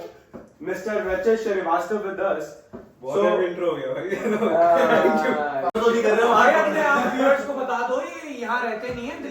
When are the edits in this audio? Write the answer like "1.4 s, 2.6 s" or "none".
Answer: 5.7 s

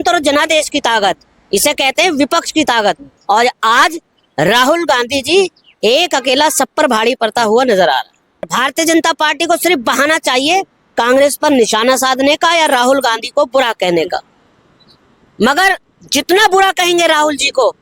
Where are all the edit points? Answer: 8.5 s

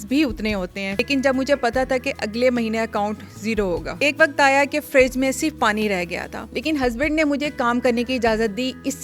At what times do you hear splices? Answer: 0.9 s, 4.0 s, 6.4 s

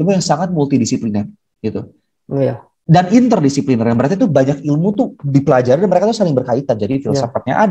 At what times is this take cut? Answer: none

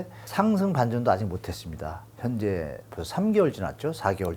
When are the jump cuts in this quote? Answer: none

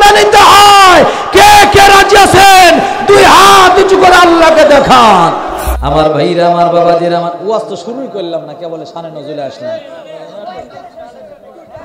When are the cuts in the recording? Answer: 5.8 s

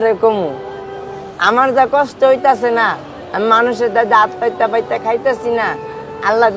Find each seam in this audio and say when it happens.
none

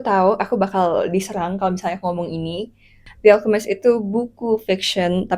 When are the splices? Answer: 2.9 s

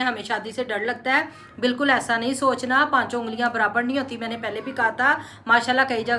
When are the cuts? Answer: none

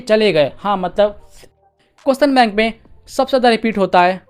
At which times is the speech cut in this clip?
1.7 s

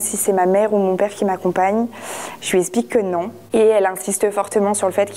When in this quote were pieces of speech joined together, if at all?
none

